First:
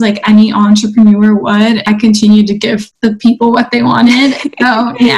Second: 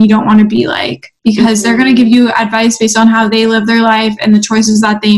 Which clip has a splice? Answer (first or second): first